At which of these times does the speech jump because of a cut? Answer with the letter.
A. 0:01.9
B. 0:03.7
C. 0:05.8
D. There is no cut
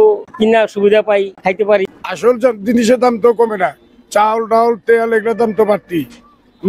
A